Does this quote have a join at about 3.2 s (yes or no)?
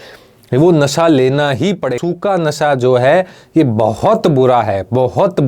no